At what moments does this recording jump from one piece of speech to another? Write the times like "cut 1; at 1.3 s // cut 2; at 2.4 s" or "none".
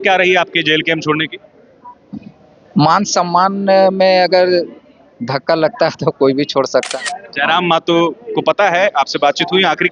cut 1; at 6.9 s